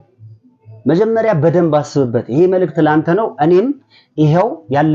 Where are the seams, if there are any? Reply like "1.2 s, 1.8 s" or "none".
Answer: none